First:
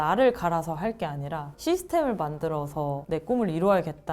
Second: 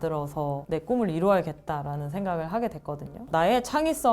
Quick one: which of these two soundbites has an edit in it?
second; 1 cut; at 3.2 s

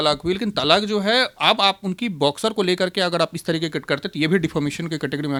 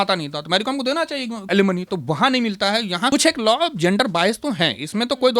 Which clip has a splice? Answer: second; 2 cuts; at 1.4 s, 3.1 s

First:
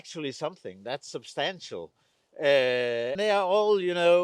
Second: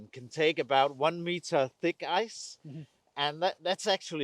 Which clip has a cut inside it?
first; 1 cut; at 3.1 s

